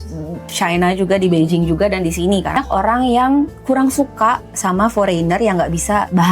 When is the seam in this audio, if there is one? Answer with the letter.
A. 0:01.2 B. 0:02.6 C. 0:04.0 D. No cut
B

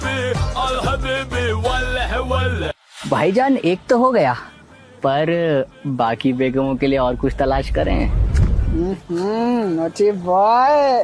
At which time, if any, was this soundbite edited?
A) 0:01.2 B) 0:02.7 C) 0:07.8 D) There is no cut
B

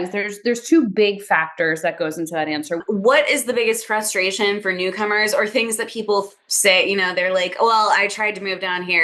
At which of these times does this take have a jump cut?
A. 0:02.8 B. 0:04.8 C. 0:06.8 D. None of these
A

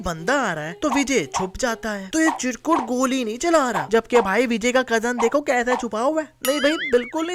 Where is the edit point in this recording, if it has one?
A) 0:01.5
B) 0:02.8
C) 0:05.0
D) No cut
D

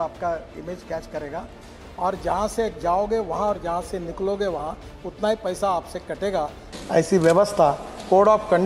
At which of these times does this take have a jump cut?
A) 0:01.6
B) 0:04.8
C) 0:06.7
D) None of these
C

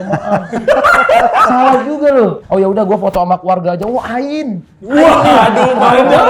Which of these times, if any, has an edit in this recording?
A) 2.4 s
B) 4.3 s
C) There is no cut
A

